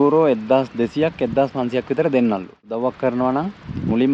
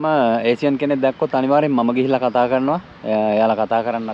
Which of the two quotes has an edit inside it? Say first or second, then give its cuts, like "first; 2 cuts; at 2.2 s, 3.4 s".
first; 1 cut; at 2.7 s